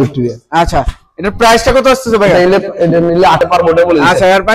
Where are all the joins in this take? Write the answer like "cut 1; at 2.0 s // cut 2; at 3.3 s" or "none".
cut 1; at 3.4 s